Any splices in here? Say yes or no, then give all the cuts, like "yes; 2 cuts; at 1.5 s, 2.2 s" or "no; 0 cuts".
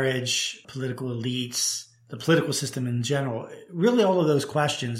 no; 0 cuts